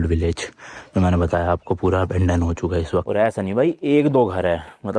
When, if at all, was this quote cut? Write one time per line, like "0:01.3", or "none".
0:03.1